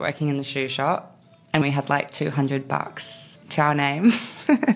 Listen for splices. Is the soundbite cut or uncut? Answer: cut